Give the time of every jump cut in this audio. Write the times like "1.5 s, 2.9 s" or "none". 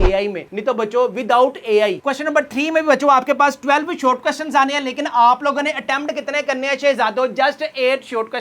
2.0 s